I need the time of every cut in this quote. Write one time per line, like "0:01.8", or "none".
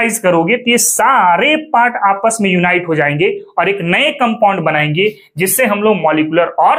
none

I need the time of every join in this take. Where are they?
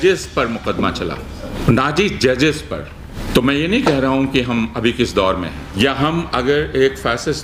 0:01.5
0:03.1
0:05.6

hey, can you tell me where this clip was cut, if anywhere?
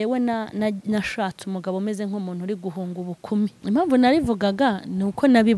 0:03.6

